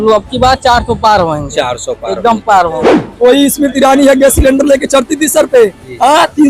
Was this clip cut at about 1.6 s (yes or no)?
no